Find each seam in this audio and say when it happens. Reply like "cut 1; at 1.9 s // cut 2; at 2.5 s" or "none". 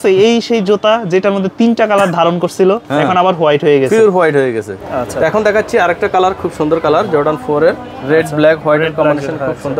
none